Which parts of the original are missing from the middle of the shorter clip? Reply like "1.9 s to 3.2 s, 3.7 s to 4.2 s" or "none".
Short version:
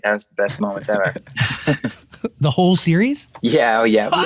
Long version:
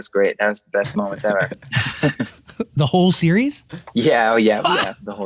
3.6 s to 3.8 s